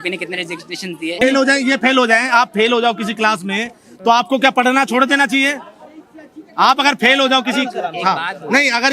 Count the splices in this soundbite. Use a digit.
1